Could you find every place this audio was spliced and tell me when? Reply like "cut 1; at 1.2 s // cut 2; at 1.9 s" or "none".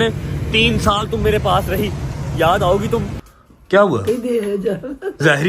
cut 1; at 3.2 s